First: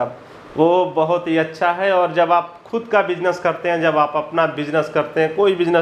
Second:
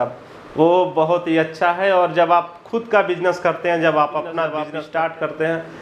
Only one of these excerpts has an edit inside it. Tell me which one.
second; 1 cut; at 4.6 s

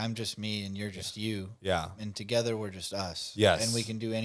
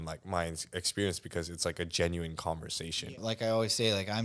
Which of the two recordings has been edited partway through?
second; 1 cut; at 3.1 s

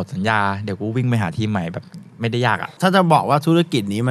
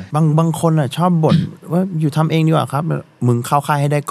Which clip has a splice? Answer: first; 1 cut; at 2.7 s

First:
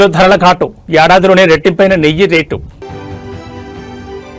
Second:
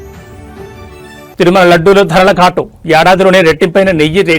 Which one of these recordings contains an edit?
second; 1 cut; at 1.0 s

